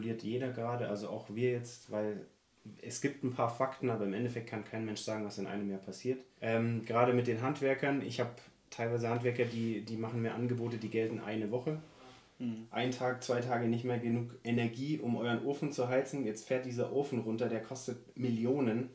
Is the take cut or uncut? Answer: cut